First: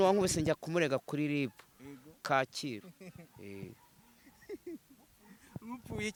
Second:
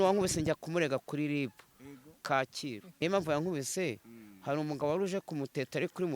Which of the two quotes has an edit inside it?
second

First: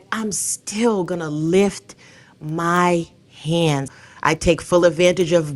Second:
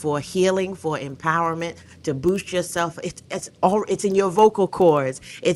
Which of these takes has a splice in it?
first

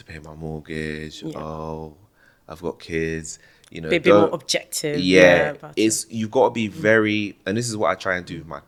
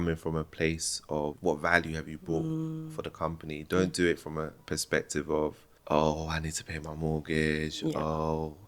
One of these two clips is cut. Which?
second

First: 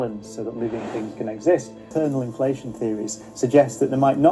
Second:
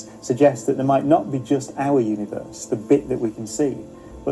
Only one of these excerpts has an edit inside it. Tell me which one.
first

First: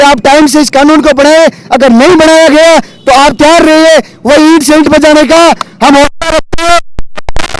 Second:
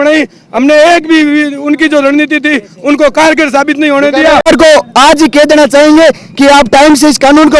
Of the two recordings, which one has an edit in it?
second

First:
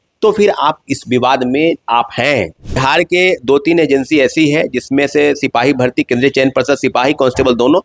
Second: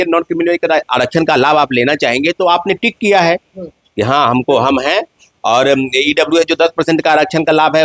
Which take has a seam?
first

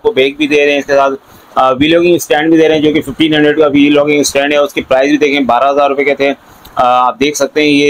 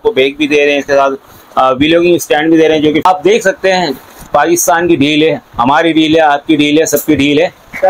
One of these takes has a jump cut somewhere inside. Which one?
second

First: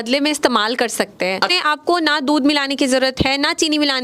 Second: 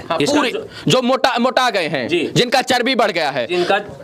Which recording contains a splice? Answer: first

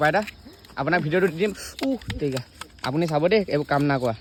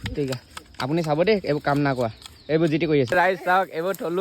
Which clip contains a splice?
second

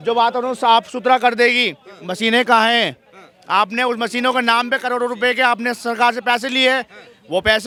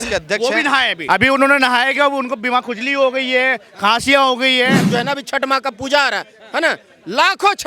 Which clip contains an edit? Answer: second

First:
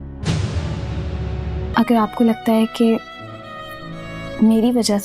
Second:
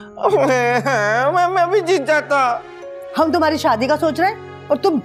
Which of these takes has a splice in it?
first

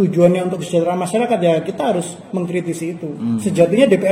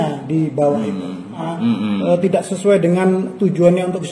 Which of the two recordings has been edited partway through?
second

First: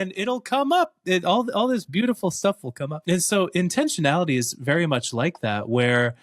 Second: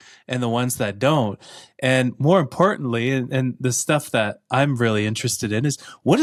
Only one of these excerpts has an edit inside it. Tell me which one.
first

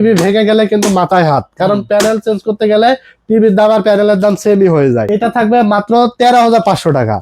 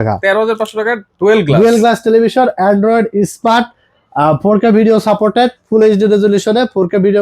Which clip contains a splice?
first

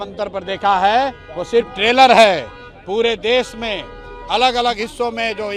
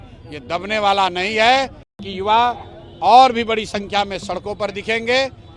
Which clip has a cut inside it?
second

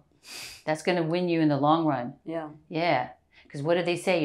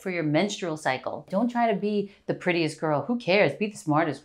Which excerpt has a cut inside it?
second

